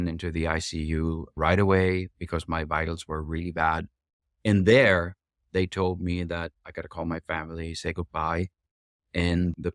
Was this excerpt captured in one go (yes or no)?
no